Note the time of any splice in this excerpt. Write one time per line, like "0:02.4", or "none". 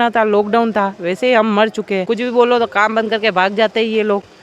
0:02.1